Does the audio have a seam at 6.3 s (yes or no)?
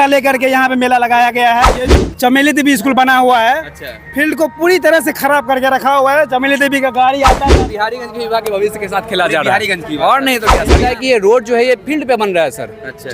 no